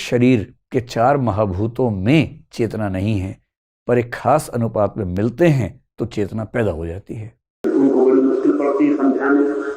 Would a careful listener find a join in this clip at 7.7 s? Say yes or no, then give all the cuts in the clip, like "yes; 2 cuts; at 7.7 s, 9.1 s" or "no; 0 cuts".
yes; 1 cut; at 7.7 s